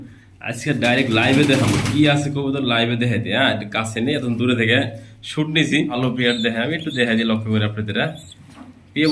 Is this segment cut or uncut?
cut